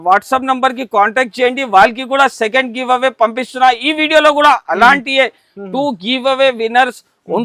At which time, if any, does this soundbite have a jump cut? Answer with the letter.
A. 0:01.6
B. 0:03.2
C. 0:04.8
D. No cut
D